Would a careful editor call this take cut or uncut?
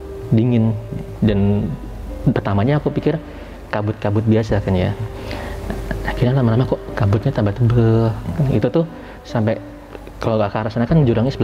uncut